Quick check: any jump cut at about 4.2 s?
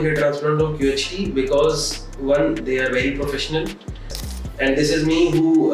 yes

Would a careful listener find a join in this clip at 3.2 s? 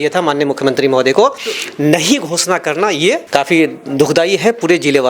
yes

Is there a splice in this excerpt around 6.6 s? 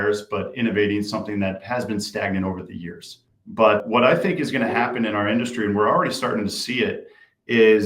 no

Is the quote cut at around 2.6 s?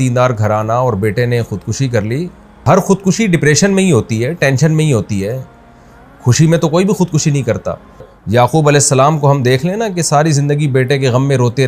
yes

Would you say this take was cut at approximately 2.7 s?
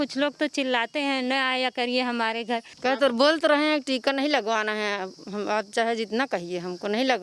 yes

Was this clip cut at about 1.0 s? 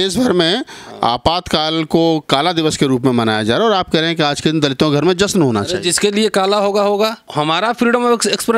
no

